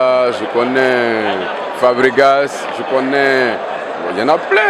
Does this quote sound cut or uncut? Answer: uncut